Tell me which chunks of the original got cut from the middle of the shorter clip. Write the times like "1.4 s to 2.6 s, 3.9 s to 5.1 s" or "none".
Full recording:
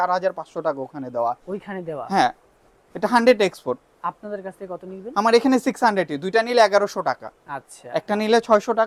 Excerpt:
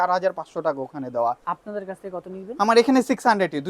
1.5 s to 4.0 s